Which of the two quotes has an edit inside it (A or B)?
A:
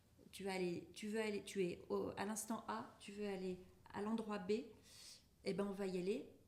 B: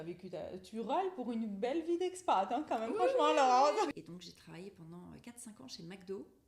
B